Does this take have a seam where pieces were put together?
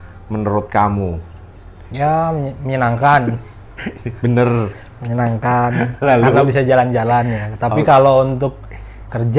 no; 0 cuts

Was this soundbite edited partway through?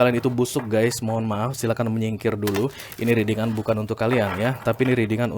no; 0 cuts

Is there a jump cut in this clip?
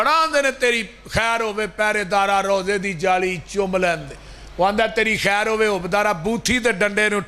no; 0 cuts

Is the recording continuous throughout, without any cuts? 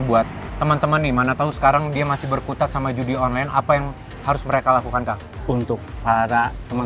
no; 1 cut; at 5.3 s

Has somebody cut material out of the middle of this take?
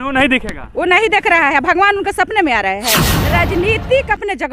yes; 1 cut; at 3.1 s

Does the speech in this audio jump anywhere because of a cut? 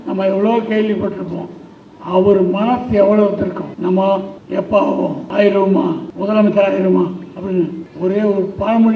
yes; 5 cuts; at 3.7 s, 4.4 s, 5.2 s, 6.1 s, 7.8 s

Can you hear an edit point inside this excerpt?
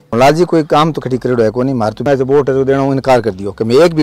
yes; 1 cut; at 2.0 s

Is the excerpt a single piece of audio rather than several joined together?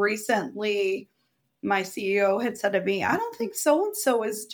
yes; 0 cuts

